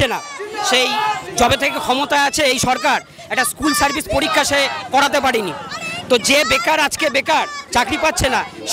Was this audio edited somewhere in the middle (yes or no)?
no